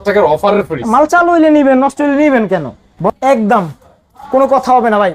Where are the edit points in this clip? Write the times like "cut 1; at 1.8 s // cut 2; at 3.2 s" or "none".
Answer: cut 1; at 2.9 s